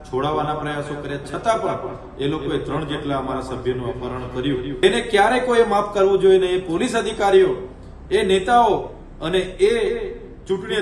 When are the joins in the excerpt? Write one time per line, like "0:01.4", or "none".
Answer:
0:04.8